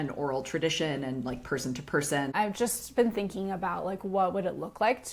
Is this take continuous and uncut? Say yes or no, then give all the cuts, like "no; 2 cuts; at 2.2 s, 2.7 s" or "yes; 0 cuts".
no; 1 cut; at 2.3 s